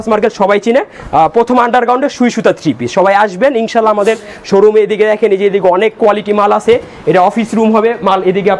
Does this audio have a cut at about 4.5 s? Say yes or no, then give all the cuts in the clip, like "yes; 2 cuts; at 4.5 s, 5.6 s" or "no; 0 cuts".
no; 0 cuts